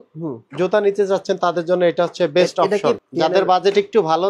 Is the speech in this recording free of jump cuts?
no; 1 cut; at 3.0 s

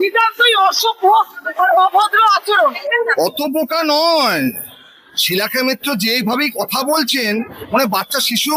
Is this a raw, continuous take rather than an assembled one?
no; 1 cut; at 2.9 s

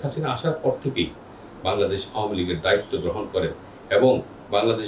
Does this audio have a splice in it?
no; 0 cuts

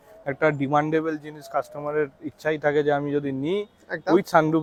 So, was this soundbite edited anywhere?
no; 0 cuts

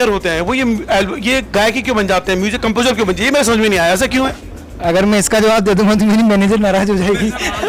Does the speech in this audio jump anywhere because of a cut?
no; 0 cuts

